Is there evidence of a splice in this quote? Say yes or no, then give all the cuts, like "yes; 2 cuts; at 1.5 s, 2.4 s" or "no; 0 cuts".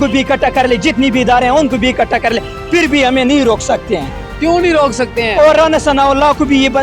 no; 0 cuts